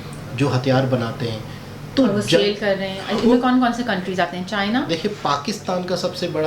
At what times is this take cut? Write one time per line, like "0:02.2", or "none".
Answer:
none